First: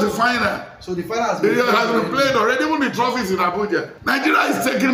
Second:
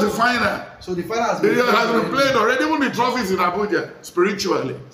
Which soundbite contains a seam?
first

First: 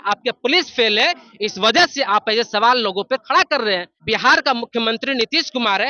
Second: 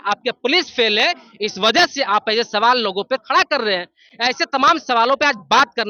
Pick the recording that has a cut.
first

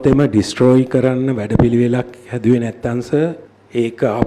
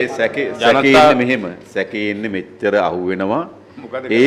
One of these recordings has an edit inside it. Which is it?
first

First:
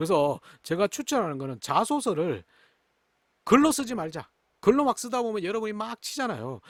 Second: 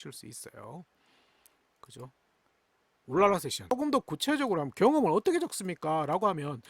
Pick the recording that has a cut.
second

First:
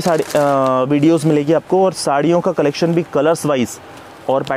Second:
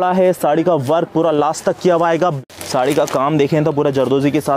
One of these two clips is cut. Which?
second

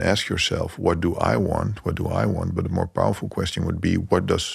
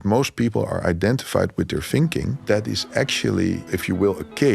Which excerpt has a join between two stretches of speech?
second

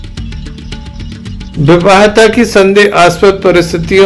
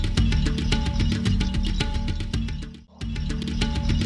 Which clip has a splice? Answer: first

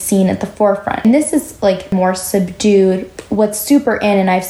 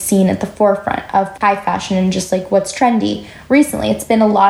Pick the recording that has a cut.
first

